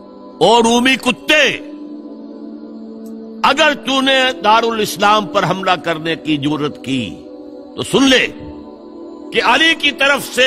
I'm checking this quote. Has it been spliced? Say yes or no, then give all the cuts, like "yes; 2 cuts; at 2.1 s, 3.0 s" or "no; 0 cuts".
no; 0 cuts